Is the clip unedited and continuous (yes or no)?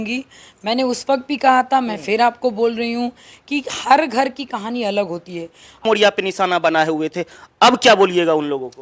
no